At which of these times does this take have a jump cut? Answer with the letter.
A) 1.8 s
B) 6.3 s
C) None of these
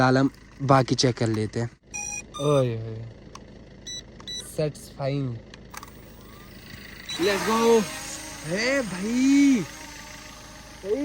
A